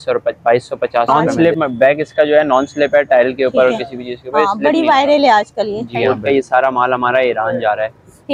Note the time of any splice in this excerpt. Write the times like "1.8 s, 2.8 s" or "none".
1.1 s, 5.9 s